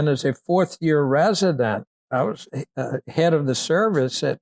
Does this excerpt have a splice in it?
yes; 1 cut; at 2.1 s

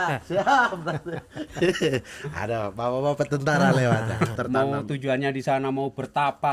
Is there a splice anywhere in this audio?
yes; 1 cut; at 4.3 s

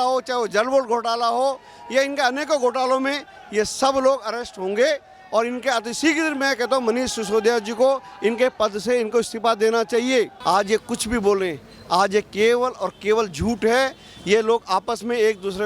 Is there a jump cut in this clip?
yes; 1 cut; at 10.4 s

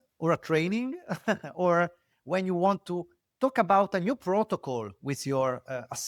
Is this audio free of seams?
yes; 0 cuts

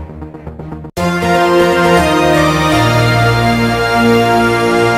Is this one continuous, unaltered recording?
yes; 0 cuts

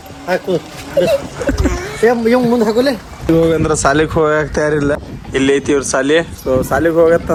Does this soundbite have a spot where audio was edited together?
no; 0 cuts

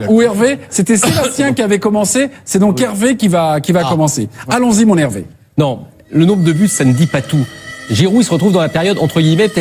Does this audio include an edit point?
no; 0 cuts

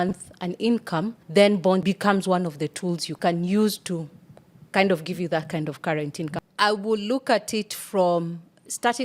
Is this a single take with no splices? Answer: no; 1 cut; at 6.4 s

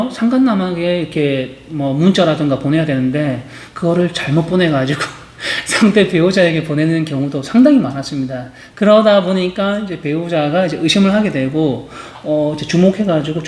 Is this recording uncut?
yes; 0 cuts

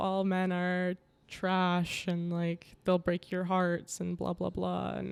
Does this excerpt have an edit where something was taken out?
no; 0 cuts

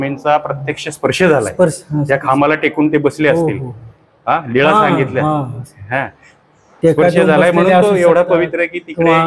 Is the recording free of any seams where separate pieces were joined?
yes; 0 cuts

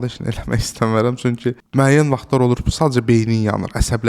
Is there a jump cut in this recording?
no; 0 cuts

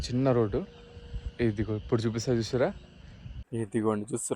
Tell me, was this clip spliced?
yes; 1 cut; at 3.4 s

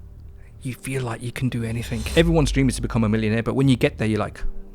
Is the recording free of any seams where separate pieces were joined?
no; 1 cut; at 2.1 s

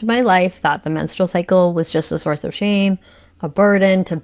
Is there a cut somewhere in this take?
no; 0 cuts

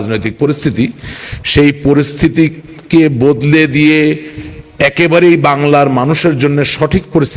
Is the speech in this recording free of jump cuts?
yes; 0 cuts

